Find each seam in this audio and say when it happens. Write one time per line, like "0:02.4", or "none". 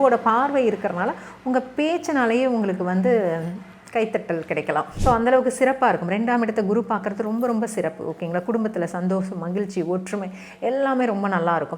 0:04.9